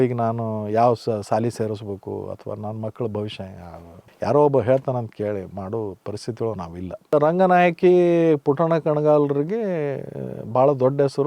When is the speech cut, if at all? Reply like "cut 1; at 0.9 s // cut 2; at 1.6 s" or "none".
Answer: cut 1; at 7.1 s